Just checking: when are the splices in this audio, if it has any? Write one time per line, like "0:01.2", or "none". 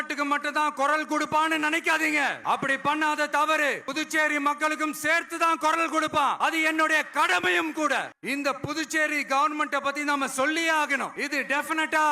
0:02.4
0:03.9
0:06.4
0:08.2
0:11.2